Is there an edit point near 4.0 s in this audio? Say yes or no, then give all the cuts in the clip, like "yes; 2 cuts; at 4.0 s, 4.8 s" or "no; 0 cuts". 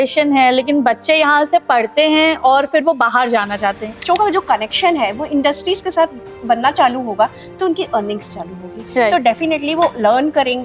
yes; 1 cut; at 4.0 s